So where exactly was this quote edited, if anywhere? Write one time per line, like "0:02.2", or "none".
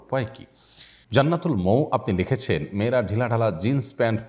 0:01.0

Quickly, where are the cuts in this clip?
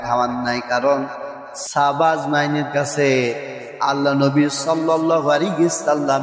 0:01.7

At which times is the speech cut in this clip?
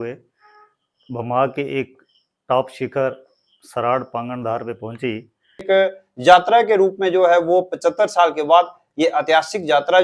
0:05.6

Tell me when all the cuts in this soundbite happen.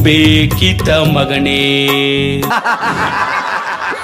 0:02.5

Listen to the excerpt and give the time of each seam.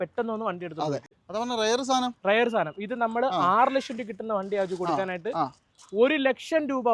0:01.1

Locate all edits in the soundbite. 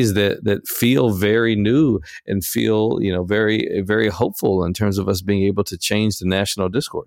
none

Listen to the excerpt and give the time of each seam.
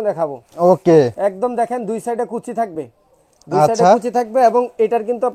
none

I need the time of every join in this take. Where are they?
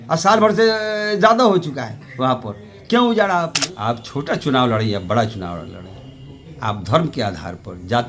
0:03.6

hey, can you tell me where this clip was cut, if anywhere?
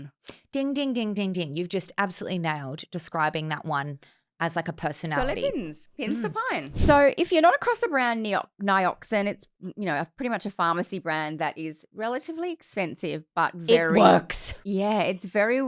0:06.7

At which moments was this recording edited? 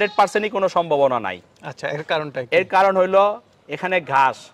none

